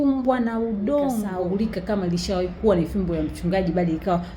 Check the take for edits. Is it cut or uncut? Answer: cut